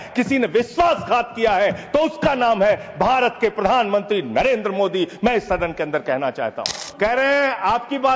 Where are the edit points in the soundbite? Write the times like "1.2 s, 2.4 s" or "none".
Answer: 6.6 s